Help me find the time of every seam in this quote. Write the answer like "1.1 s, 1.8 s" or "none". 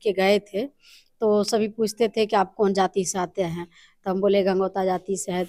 none